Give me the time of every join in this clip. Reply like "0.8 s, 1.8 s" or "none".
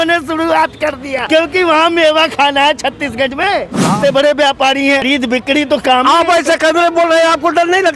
1.1 s, 3.9 s, 5.0 s